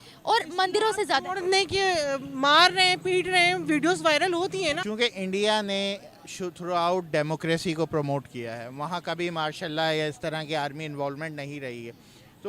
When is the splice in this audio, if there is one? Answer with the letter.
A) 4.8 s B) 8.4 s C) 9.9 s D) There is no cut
A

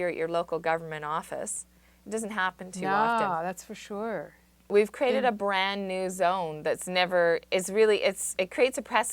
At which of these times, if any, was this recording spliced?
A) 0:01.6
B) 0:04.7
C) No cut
B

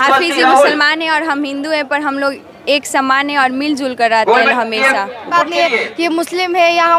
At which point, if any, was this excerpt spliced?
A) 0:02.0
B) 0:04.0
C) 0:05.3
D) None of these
C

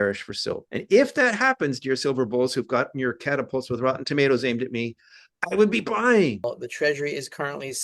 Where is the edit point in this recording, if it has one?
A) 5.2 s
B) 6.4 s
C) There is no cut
B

